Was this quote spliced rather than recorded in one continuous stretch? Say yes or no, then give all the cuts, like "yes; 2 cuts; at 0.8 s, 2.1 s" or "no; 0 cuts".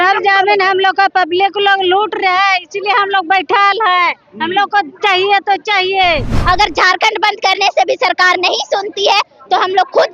yes; 1 cut; at 6.4 s